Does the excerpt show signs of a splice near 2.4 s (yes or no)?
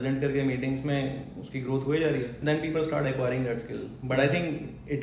yes